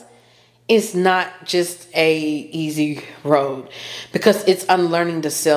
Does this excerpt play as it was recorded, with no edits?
yes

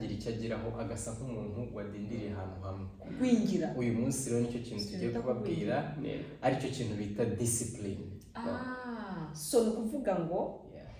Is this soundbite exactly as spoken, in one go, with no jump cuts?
yes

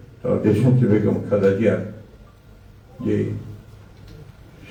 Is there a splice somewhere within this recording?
no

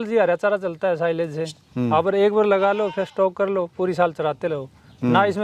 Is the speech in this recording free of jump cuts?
yes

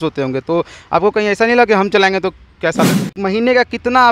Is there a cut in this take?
yes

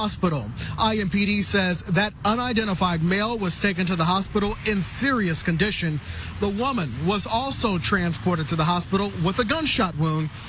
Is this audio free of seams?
yes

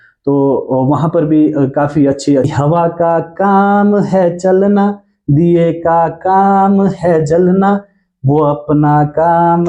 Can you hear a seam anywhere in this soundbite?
yes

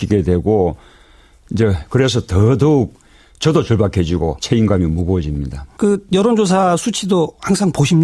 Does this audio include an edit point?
yes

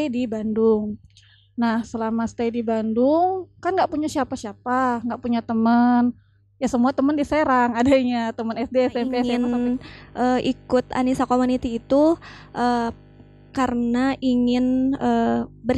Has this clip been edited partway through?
yes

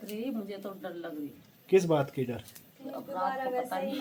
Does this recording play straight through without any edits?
yes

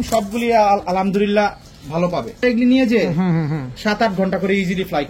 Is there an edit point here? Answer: yes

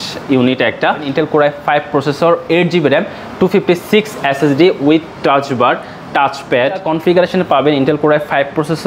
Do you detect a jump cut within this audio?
yes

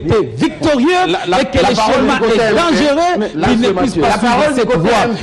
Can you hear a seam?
no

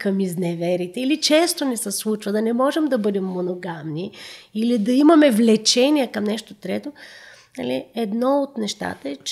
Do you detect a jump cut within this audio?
no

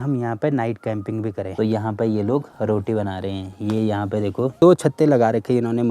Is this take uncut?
no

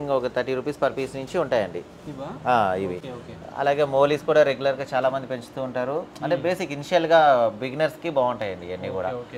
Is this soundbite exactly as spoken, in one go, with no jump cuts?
yes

